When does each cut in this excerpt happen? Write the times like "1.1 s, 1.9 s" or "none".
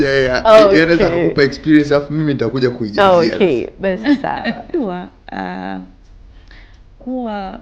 4.7 s